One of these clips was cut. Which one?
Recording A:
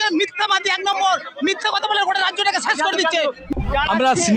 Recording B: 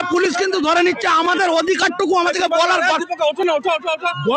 A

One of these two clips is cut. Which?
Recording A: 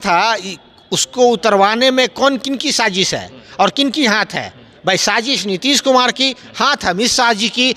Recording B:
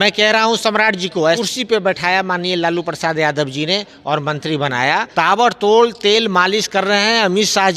B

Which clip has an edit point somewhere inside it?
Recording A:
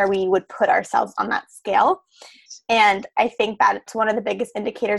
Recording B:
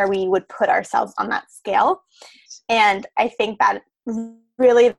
A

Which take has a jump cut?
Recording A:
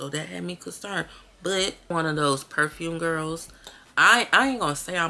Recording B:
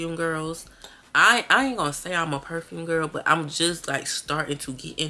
A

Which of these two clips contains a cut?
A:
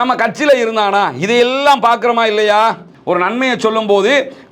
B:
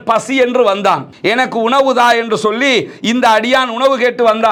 A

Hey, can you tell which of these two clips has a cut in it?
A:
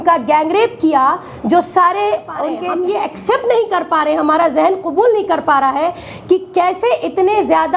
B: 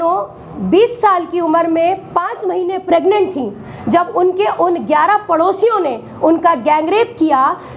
A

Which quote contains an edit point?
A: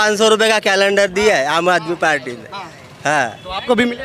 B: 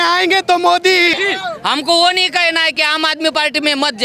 B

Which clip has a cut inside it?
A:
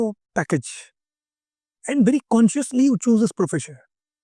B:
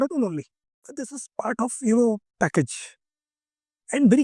B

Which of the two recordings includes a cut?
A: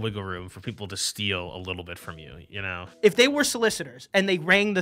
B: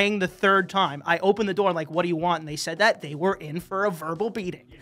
A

